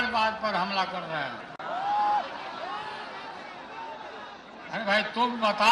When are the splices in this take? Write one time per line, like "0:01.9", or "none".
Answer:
none